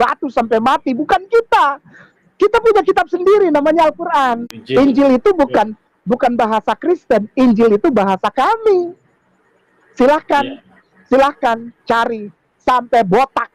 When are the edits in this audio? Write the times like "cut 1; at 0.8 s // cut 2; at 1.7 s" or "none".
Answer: cut 1; at 4.5 s